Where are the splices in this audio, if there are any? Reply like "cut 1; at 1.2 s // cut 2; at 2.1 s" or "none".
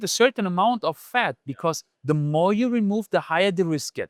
none